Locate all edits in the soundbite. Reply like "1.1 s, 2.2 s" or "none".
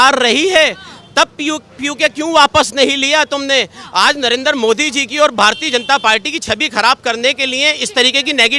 none